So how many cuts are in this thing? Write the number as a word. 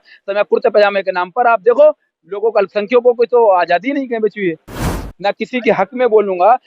one